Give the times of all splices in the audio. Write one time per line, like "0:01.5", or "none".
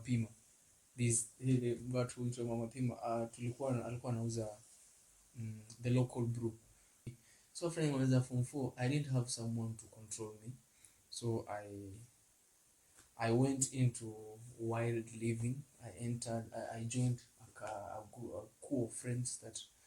0:07.2